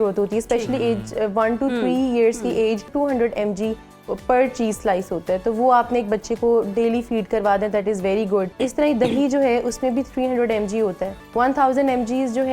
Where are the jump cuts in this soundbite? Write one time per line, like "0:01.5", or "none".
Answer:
0:02.9
0:08.5
0:11.2